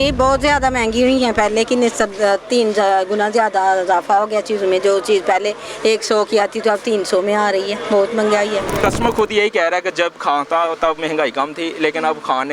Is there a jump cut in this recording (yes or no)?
yes